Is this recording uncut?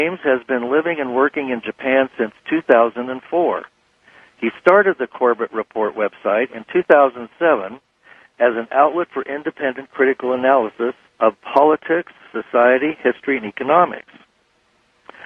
no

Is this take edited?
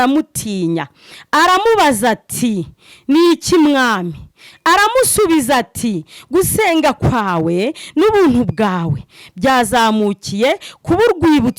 no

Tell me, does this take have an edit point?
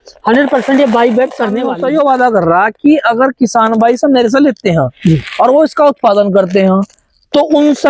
yes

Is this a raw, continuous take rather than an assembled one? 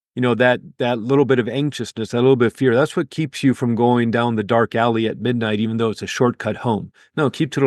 yes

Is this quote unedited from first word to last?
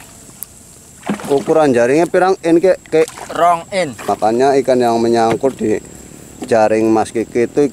no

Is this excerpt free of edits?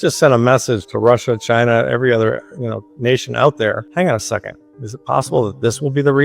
no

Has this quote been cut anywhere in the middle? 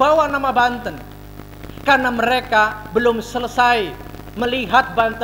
no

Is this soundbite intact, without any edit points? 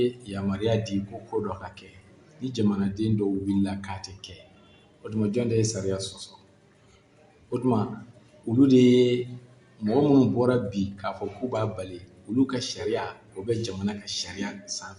yes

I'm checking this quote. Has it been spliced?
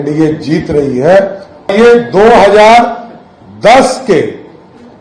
yes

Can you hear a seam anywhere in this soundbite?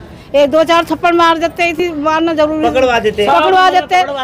no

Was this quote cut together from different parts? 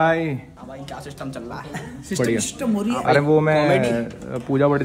no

